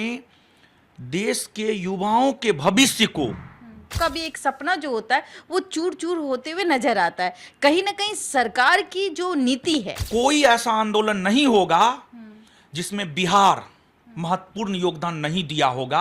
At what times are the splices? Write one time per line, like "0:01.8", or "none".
0:03.9
0:10.0